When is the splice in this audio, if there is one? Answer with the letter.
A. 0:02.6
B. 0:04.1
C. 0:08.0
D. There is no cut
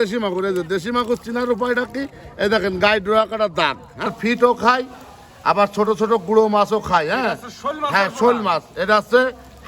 B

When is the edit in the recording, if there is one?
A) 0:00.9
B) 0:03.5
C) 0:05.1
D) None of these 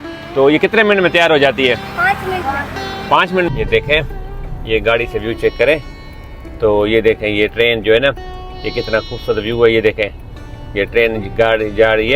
B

